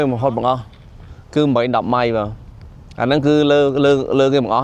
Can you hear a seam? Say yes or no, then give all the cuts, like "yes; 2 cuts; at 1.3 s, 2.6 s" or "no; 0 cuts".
no; 0 cuts